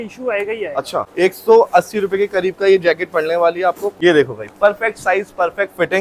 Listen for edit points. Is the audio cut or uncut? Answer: cut